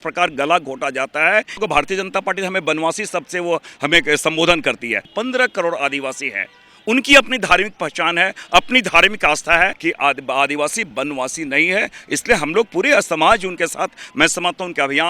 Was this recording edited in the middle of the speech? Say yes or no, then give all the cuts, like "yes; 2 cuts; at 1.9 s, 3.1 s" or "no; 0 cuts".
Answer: yes; 3 cuts; at 1.6 s, 5.1 s, 9.8 s